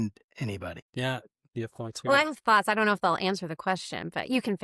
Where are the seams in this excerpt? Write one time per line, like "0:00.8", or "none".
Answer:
0:01.4

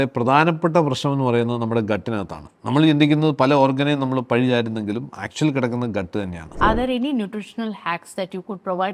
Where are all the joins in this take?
0:06.5

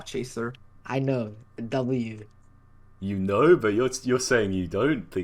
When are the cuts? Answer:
none

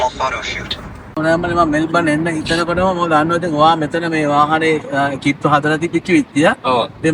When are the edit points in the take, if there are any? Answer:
0:01.2

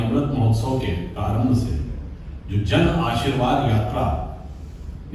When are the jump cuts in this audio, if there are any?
none

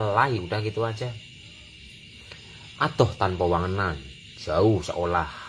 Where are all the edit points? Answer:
none

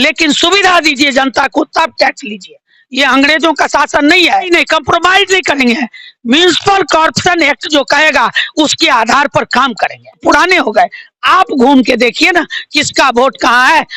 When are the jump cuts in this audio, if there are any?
0:04.5
0:10.2

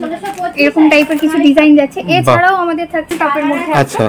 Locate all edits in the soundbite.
0:03.1

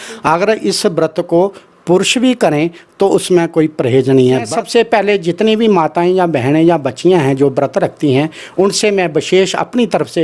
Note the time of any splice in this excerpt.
0:04.5

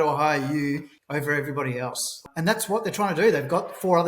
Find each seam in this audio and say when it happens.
0:00.9
0:02.1

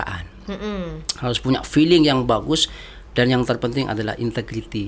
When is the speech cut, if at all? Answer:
none

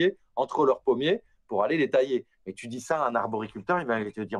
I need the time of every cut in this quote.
none

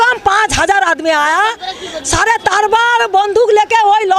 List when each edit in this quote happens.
none

